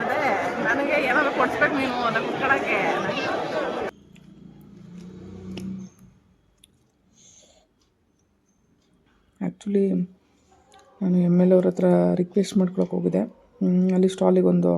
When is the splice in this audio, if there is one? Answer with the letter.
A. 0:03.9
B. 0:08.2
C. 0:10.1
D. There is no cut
A